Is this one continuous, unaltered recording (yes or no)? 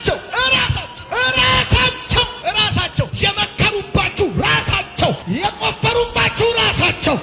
yes